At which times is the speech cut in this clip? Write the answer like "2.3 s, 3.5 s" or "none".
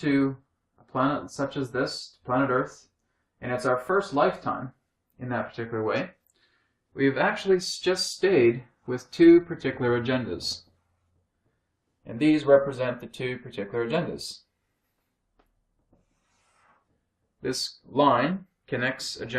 2.4 s